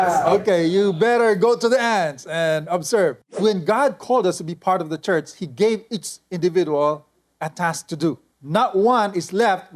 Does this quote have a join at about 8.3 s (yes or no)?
yes